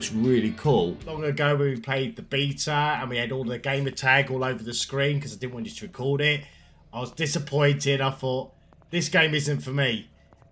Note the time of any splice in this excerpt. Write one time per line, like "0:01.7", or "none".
0:01.1